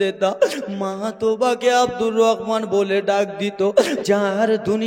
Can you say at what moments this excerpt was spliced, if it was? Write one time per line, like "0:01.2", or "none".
0:04.0